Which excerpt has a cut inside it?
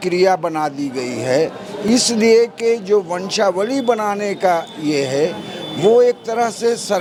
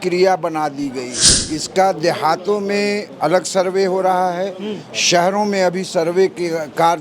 second; 1 cut; at 1.2 s

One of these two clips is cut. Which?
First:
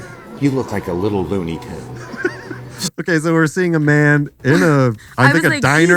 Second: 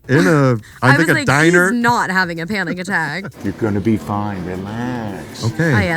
second; 1 cut; at 3.3 s

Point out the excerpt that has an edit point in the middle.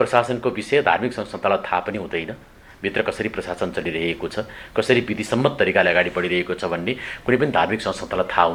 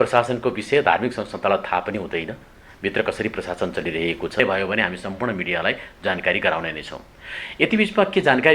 second; 1 cut; at 4.4 s

